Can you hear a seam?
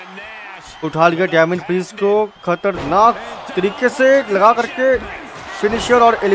no; 0 cuts

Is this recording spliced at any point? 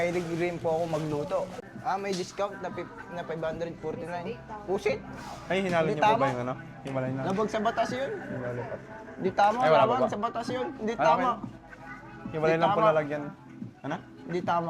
yes; 1 cut; at 1.7 s

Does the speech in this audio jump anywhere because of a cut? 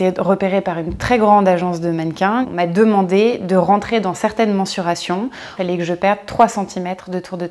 yes; 2 cuts; at 2.4 s, 5.6 s

